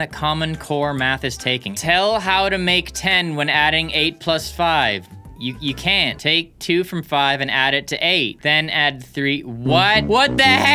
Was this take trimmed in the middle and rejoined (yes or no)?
yes